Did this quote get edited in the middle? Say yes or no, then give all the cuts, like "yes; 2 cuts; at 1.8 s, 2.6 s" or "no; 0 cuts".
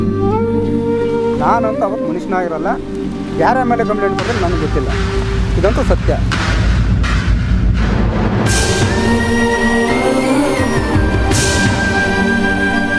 no; 0 cuts